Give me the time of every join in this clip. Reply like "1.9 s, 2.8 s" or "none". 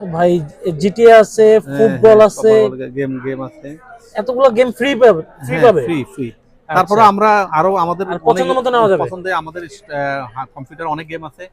none